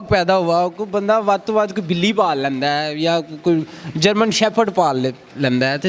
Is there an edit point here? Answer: no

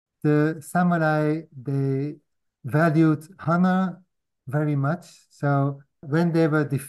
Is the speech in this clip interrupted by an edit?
yes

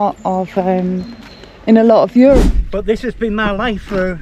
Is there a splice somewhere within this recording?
yes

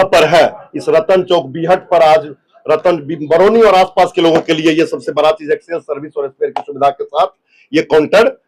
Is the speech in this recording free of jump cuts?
yes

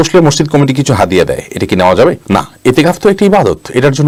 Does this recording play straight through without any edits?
yes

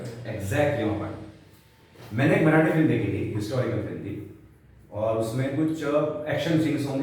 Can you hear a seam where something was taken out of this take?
no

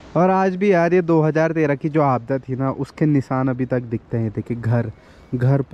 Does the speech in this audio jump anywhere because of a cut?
no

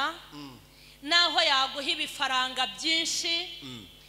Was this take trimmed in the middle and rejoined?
no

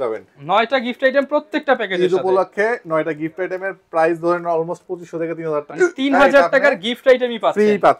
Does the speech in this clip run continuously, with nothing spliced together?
yes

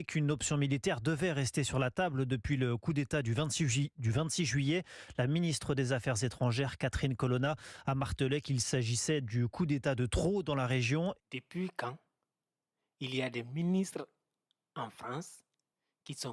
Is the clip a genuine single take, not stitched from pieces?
no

